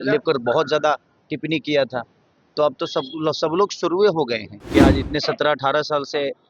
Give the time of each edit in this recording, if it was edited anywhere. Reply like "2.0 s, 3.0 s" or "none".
4.5 s